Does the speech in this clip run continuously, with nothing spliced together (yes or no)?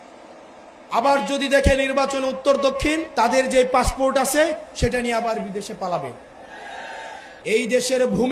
no